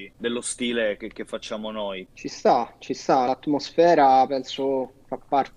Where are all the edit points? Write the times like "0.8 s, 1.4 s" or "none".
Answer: 2.0 s